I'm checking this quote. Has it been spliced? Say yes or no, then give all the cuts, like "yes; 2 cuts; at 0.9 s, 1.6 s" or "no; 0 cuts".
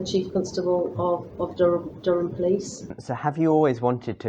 yes; 1 cut; at 2.9 s